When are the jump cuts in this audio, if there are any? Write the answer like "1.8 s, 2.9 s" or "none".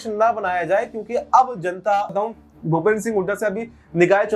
2.1 s